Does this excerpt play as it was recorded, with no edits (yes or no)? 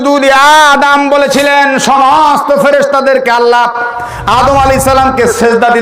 yes